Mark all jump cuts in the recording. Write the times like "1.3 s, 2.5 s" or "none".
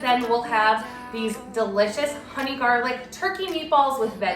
none